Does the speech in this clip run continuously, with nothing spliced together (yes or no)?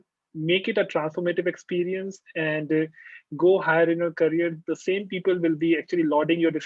yes